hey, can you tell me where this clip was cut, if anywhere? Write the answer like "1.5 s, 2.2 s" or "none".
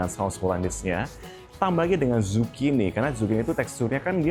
none